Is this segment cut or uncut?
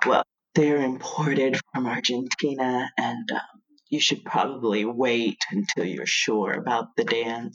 uncut